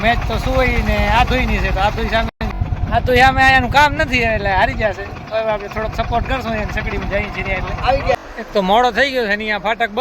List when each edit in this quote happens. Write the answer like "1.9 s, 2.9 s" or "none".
2.4 s, 8.2 s